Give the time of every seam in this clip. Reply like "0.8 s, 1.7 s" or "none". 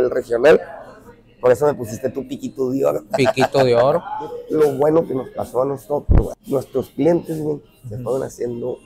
4.4 s